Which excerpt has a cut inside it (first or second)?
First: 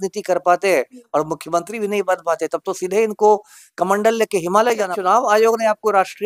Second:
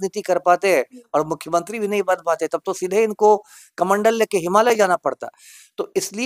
first